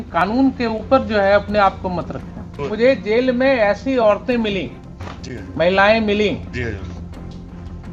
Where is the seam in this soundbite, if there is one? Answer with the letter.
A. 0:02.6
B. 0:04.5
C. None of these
A